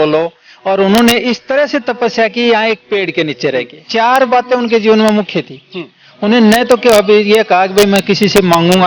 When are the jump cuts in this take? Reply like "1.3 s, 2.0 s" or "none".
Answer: 3.9 s